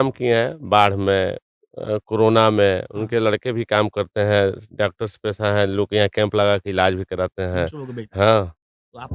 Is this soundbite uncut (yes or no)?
yes